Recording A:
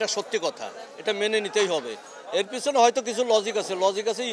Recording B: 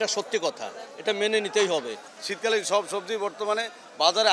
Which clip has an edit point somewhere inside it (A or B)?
B